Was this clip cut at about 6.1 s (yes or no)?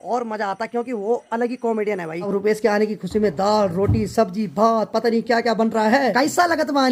yes